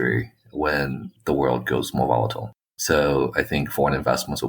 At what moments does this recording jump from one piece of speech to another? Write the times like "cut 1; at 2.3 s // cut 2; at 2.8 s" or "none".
cut 1; at 2.7 s